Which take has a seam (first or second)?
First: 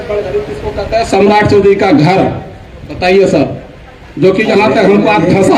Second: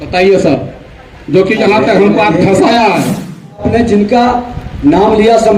second